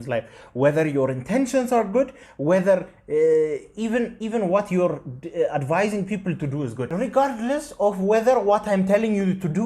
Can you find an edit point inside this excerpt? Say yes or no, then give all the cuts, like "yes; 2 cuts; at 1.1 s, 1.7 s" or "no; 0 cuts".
yes; 1 cut; at 6.8 s